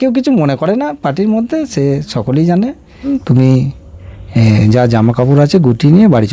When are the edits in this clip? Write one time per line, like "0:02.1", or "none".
0:03.1